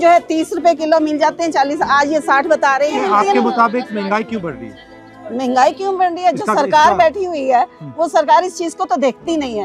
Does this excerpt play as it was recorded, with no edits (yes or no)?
yes